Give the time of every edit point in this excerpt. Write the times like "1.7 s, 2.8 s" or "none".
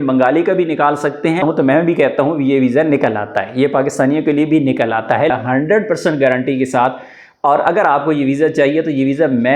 1.4 s, 5.3 s